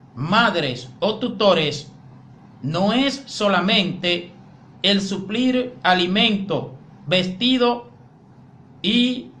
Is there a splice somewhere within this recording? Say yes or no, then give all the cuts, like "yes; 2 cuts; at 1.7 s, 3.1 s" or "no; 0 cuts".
yes; 1 cut; at 5.7 s